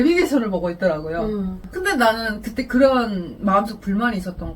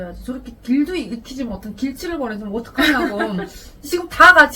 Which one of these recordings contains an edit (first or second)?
first